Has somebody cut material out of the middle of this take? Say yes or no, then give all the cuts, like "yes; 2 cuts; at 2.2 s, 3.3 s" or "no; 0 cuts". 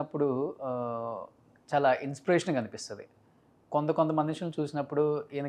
no; 0 cuts